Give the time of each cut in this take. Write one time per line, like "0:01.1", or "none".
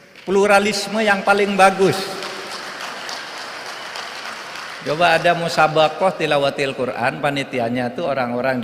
none